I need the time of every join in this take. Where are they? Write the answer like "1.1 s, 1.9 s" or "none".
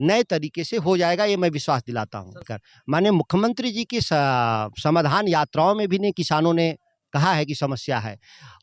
2.3 s